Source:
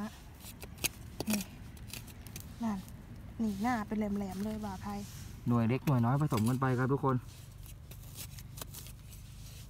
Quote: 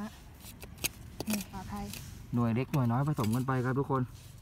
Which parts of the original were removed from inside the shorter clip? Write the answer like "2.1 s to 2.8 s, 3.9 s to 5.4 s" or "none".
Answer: 1.6 s to 4.7 s